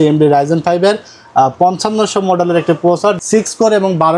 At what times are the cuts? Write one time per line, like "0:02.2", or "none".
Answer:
none